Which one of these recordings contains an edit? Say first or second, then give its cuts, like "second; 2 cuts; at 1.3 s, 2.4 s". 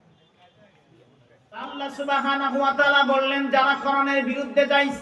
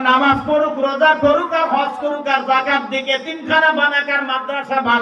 first; 1 cut; at 1.7 s